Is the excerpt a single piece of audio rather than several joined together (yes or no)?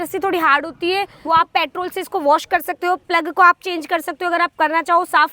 no